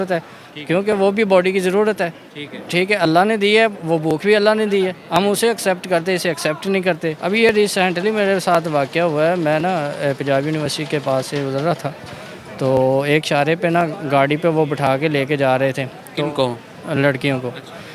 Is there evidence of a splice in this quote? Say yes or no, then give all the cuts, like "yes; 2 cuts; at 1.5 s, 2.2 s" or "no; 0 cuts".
yes; 1 cut; at 7.2 s